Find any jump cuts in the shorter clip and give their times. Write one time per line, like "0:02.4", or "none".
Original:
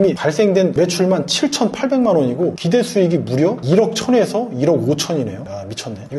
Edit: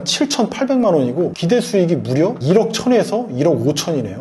none